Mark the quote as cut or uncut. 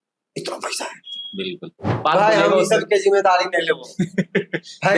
cut